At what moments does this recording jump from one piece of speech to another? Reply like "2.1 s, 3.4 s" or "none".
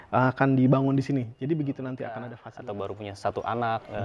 2.4 s